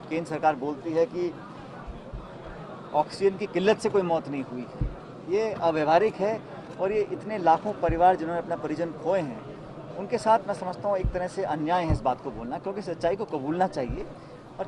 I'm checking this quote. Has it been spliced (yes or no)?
no